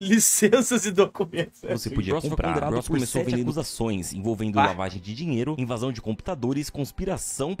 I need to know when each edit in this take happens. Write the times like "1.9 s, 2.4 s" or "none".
3.5 s